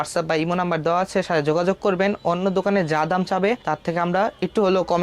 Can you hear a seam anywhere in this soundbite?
no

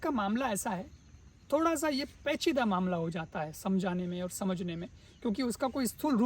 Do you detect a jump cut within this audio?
no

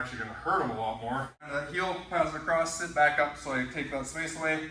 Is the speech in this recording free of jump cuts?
no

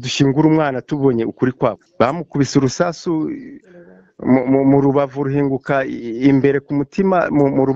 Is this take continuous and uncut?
no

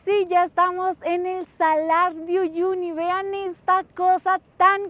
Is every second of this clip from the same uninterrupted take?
yes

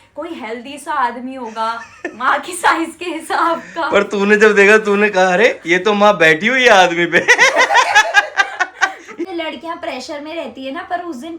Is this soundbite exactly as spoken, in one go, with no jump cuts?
no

